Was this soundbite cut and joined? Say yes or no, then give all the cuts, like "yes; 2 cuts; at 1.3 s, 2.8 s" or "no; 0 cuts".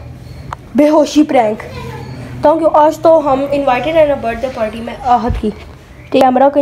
no; 0 cuts